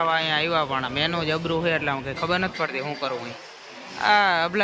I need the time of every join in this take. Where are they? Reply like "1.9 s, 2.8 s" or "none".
none